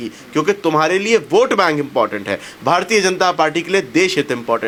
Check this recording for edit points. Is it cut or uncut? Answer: uncut